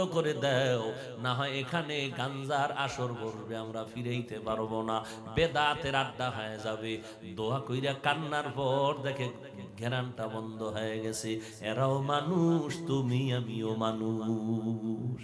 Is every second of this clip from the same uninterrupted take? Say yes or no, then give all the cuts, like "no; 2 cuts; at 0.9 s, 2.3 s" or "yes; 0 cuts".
yes; 0 cuts